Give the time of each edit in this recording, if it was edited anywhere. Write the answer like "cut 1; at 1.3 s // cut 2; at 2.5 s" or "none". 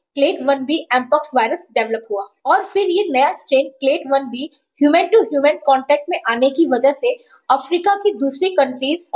none